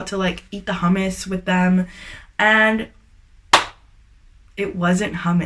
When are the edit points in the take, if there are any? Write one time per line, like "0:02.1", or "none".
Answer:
none